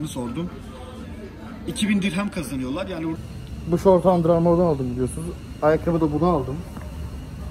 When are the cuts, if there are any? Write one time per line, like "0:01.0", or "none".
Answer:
0:03.2